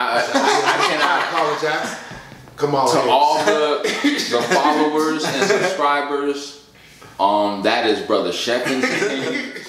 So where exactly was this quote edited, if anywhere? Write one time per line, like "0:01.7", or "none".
none